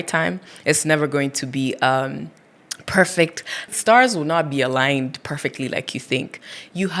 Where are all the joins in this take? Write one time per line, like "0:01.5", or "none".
0:03.7